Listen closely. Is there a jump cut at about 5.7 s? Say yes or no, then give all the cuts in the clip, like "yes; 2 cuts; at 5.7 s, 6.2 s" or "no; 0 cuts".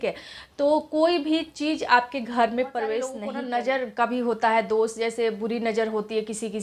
no; 1 cut; at 3.3 s